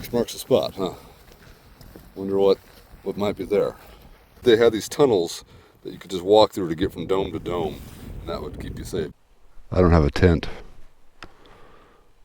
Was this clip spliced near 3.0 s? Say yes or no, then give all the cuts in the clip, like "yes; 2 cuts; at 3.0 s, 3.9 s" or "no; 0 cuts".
no; 2 cuts; at 4.4 s, 9.1 s